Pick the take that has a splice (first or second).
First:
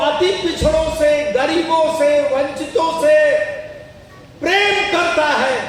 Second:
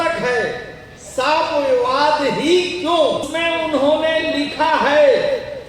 second